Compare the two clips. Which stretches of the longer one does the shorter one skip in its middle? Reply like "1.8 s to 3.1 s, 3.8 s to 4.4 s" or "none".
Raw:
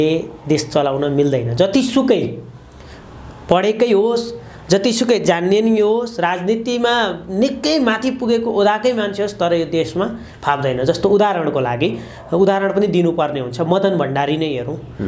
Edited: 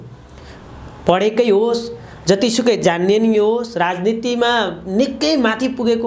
none